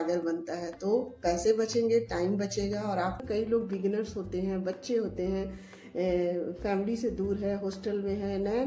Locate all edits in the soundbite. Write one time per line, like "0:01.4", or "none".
0:03.2